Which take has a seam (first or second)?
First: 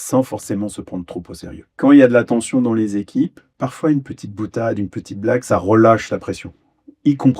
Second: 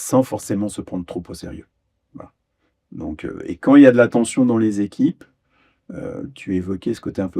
first